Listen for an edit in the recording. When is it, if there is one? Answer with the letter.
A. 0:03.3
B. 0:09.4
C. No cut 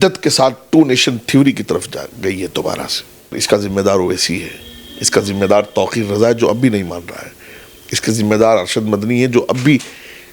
A